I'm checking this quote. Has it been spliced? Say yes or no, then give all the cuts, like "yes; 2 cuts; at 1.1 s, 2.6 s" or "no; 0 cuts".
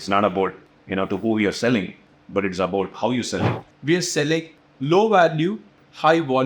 yes; 1 cut; at 3.6 s